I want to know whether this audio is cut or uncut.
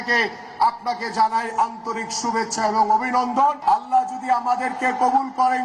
cut